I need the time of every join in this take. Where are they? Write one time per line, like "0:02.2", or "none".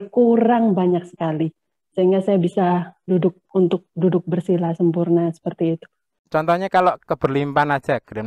0:06.2